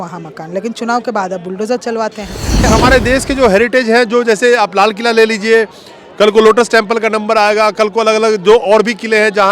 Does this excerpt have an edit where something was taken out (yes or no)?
yes